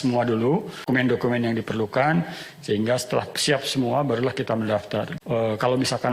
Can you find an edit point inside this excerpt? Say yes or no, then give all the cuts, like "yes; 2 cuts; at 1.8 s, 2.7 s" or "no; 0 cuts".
yes; 2 cuts; at 0.9 s, 5.1 s